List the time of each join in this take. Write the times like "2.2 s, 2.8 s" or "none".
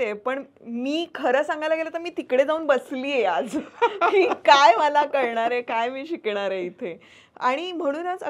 none